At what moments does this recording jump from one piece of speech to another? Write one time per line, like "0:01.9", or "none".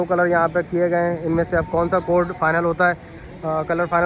none

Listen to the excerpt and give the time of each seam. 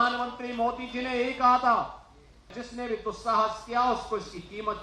0:02.6

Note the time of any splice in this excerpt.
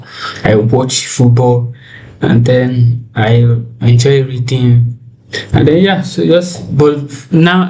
none

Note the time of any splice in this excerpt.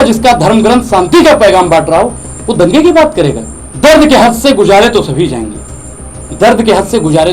0:03.9

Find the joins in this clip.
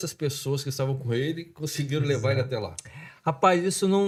none

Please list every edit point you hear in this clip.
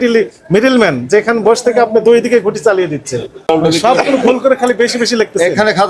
0:03.5

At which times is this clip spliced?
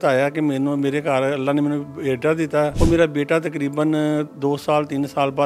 0:02.7

